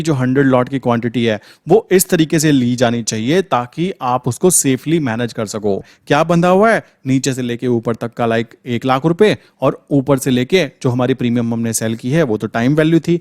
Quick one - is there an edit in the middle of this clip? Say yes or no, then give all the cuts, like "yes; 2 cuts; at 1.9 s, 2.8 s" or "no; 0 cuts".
yes; 1 cut; at 5.8 s